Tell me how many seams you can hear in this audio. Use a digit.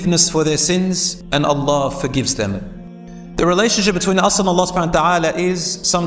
2